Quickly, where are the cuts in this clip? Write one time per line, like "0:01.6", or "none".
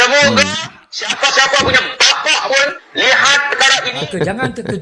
0:03.9